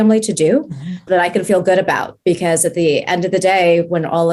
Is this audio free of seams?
yes; 0 cuts

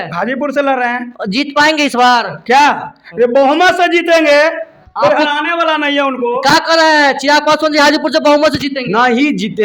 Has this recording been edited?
no; 0 cuts

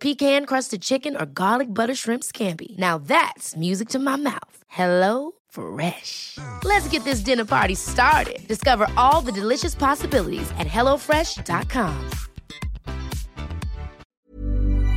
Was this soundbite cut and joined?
yes; 1 cut; at 14.0 s

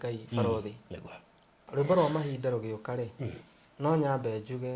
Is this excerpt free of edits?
no; 1 cut; at 1.6 s

